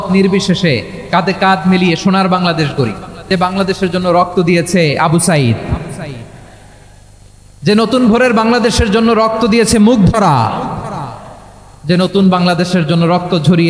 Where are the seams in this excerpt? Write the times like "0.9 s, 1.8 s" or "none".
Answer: 3.1 s